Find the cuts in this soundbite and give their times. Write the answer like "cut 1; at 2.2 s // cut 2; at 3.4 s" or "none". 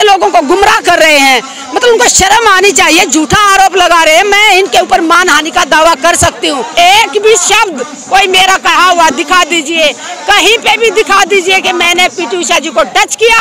cut 1; at 6.6 s